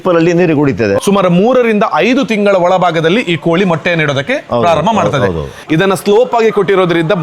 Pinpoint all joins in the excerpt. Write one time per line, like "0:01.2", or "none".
0:01.0
0:05.6

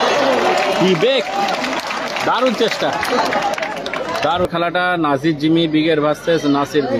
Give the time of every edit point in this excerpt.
0:04.5

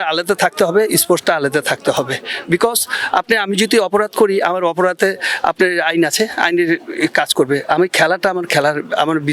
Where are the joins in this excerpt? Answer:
none

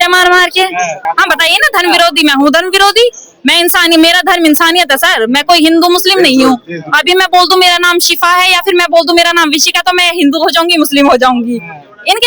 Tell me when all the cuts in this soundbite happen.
0:01.0

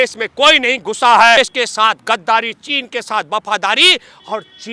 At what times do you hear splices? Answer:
0:01.4

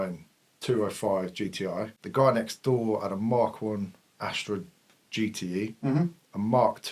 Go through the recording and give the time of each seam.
0:01.9

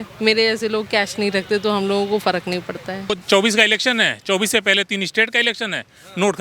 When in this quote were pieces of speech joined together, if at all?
0:02.9

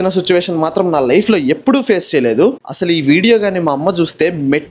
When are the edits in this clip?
0:02.6

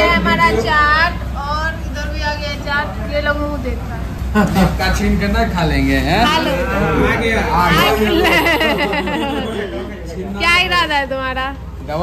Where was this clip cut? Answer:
none

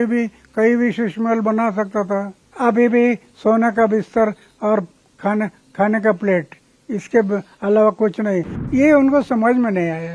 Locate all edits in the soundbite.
0:02.4
0:08.6

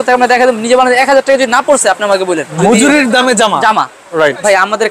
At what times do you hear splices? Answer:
0:02.5

